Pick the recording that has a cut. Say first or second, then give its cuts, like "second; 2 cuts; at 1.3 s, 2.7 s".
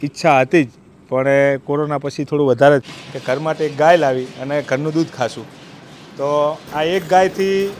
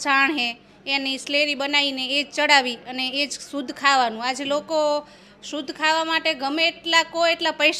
first; 1 cut; at 2.9 s